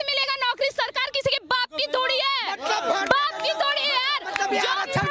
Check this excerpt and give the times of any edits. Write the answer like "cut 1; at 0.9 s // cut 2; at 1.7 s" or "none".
none